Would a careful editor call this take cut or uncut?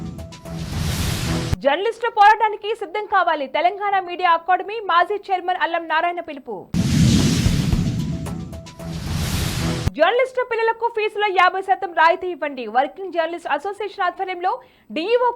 cut